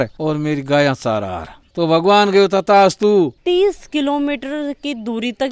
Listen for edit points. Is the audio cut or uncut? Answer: cut